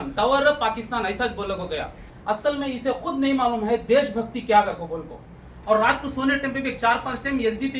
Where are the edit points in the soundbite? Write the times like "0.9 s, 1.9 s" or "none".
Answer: 2.1 s, 5.5 s